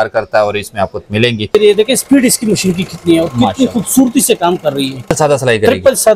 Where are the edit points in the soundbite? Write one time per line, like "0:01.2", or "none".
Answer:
0:01.5
0:05.1